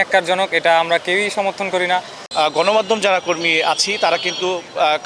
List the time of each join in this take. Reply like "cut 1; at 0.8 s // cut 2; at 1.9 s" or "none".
cut 1; at 2.2 s